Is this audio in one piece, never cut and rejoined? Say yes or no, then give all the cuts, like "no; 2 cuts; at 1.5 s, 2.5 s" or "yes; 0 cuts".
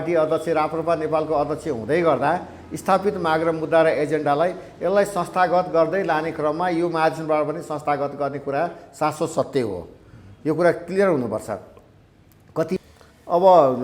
no; 1 cut; at 12.8 s